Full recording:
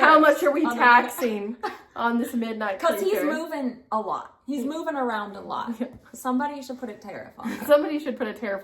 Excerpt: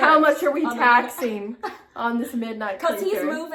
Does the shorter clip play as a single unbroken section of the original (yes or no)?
yes